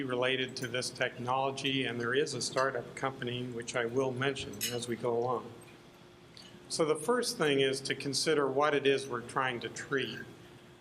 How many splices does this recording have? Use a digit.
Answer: 1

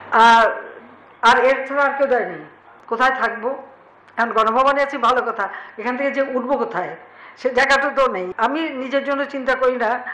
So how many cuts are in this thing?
2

